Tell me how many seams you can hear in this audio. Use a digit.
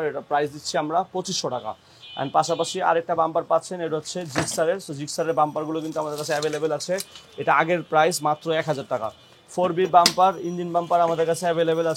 0